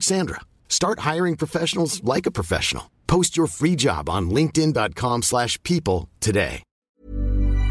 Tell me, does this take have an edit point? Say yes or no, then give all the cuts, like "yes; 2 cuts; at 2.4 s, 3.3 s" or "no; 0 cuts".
yes; 1 cut; at 6.8 s